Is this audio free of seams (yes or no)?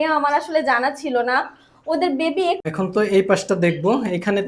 no